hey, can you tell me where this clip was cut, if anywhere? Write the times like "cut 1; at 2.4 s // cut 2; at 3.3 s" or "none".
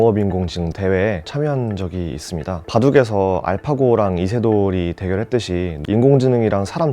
cut 1; at 5.8 s

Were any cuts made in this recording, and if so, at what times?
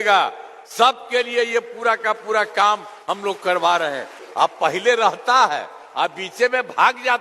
cut 1; at 4.2 s

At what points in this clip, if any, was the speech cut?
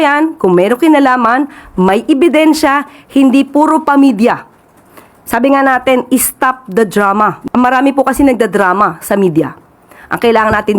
cut 1; at 7.4 s

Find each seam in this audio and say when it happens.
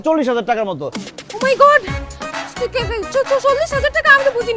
cut 1; at 0.9 s

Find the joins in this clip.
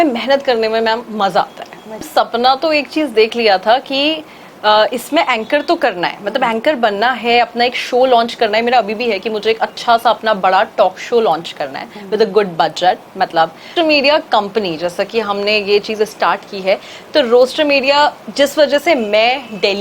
cut 1; at 2.1 s // cut 2; at 13.7 s

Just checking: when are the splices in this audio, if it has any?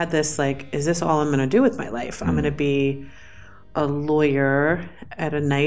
none

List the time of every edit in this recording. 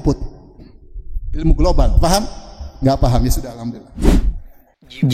cut 1; at 3.9 s

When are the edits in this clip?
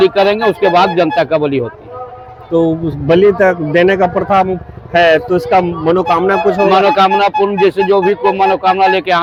none

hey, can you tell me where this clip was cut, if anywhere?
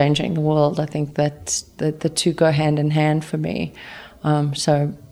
none

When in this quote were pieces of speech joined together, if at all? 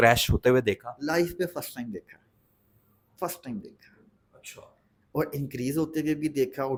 none

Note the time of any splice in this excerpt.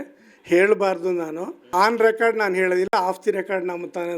cut 1; at 1.6 s

